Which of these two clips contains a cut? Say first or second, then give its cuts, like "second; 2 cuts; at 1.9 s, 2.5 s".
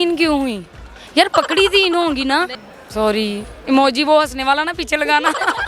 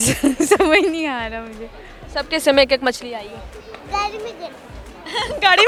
first; 1 cut; at 2.6 s